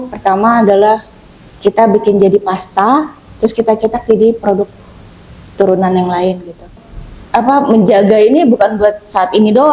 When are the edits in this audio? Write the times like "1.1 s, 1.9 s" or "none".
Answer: 6.8 s